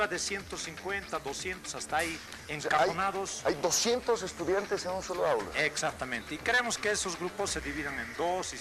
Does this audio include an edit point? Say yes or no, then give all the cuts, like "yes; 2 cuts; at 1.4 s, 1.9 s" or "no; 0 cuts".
no; 0 cuts